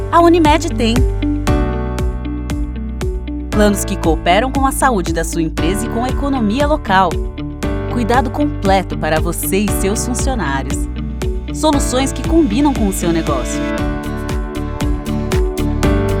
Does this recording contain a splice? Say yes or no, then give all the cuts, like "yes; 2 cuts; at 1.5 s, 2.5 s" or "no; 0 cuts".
no; 0 cuts